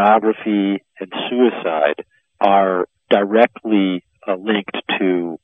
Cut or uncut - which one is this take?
uncut